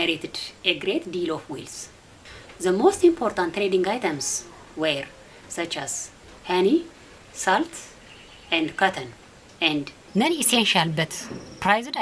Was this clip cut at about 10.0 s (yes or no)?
yes